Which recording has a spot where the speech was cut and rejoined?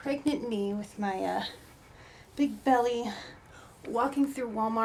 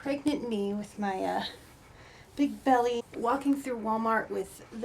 second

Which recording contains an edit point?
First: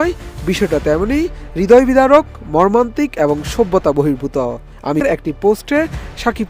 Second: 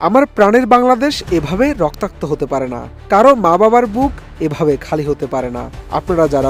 first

